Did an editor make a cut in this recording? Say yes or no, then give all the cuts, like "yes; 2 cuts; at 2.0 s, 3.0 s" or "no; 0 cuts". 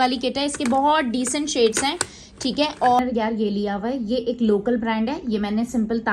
yes; 1 cut; at 3.0 s